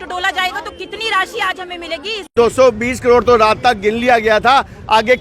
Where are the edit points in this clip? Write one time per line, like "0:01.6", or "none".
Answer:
0:02.3